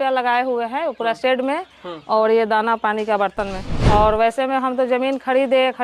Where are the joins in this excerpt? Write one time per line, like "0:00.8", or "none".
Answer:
0:03.7